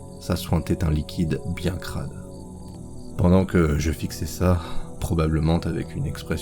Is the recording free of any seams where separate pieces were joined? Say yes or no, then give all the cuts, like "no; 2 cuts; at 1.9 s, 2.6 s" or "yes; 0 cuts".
no; 1 cut; at 3.1 s